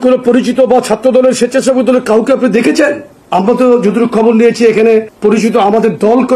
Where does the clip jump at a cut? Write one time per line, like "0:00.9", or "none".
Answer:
0:03.1
0:05.1